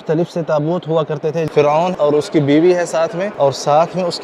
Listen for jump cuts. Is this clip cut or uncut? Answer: cut